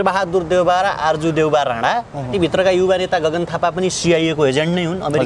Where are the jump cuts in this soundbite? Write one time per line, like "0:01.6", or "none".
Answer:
0:02.3